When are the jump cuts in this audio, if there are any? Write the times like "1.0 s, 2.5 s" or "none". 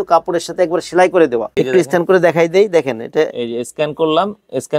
1.5 s